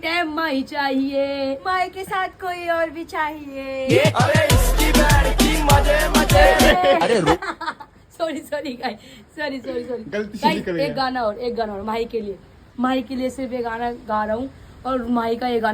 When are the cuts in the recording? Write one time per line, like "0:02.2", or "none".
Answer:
none